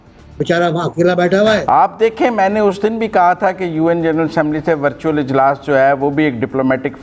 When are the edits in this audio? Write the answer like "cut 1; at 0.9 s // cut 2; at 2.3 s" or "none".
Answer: cut 1; at 1.6 s